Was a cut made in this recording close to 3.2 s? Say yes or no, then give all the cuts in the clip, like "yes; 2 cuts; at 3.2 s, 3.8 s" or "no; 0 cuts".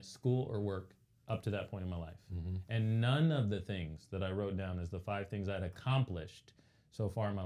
no; 0 cuts